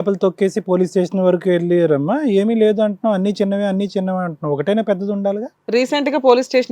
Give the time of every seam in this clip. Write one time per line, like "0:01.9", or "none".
0:05.5